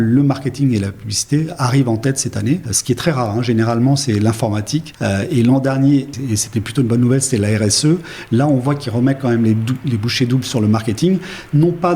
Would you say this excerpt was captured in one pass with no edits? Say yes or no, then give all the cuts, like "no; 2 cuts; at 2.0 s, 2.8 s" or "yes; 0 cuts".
no; 3 cuts; at 2.7 s, 4.9 s, 6.2 s